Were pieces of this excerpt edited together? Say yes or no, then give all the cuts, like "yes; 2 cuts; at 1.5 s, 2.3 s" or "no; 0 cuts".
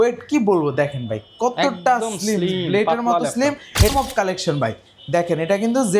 yes; 1 cut; at 3.9 s